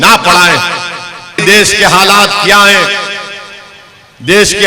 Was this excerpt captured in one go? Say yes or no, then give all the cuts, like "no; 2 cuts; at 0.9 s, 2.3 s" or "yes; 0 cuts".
no; 1 cut; at 1.4 s